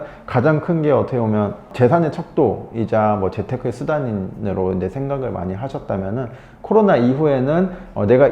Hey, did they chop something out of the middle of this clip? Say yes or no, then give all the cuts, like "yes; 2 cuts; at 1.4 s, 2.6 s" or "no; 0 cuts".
yes; 1 cut; at 1.7 s